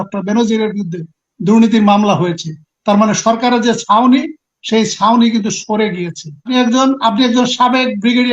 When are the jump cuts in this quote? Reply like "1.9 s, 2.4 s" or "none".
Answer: 6.5 s